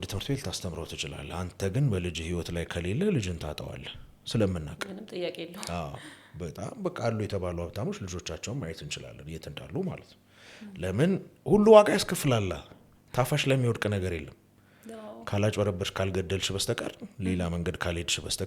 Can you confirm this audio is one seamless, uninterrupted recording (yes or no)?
yes